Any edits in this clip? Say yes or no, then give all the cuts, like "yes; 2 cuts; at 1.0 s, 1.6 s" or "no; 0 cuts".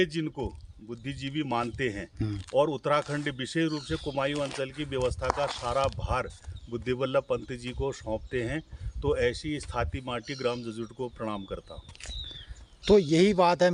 no; 0 cuts